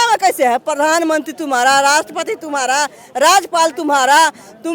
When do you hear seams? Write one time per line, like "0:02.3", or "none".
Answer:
none